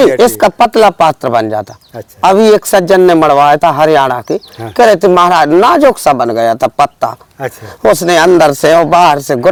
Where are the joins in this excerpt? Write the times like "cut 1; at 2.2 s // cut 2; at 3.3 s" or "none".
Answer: none